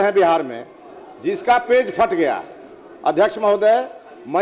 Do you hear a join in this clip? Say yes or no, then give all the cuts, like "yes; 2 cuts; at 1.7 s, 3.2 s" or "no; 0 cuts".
no; 0 cuts